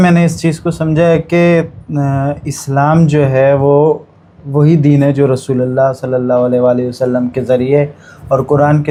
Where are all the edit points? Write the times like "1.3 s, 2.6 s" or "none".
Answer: none